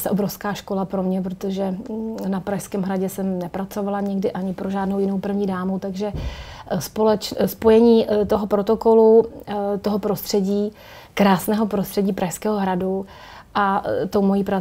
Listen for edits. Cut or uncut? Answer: uncut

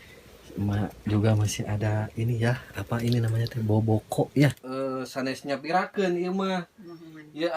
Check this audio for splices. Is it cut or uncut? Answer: cut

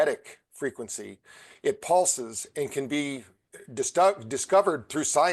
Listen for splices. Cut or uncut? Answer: uncut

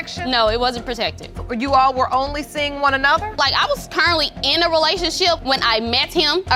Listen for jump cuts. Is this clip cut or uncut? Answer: uncut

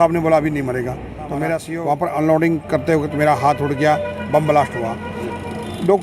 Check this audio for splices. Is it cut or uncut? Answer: cut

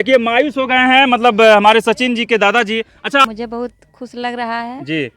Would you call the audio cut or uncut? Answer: cut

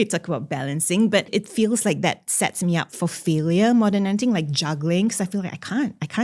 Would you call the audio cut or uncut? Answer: cut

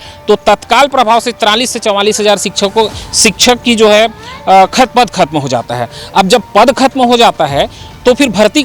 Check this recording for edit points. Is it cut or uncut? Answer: uncut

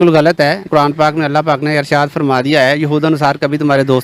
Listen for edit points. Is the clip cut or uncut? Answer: uncut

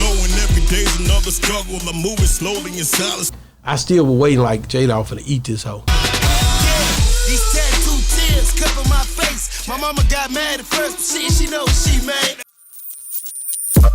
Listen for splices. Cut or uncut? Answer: cut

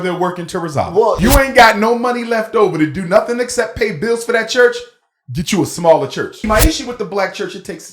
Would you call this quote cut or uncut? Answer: cut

